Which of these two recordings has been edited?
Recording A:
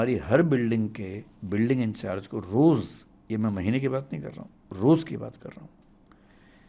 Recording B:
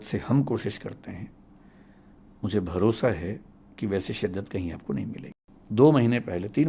B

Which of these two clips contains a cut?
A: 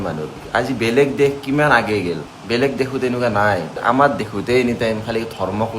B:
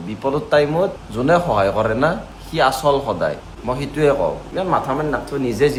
A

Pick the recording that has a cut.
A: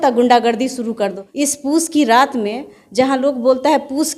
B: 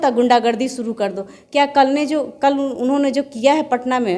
A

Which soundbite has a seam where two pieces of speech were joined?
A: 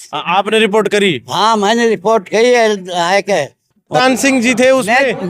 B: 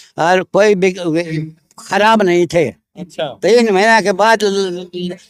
A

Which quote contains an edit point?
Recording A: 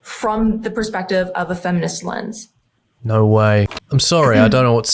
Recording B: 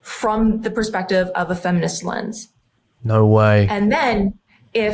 A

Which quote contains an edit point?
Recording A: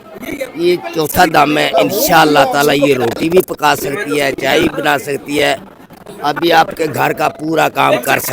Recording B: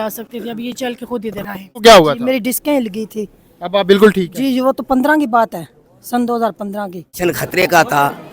B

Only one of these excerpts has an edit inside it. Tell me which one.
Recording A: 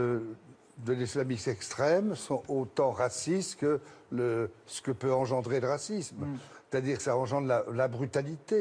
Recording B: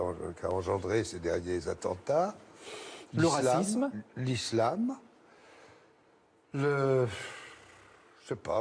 B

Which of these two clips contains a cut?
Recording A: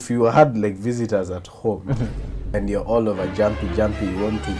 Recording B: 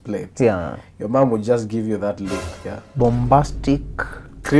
A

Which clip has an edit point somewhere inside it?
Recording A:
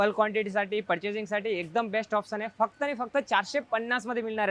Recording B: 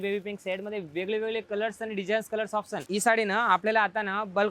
B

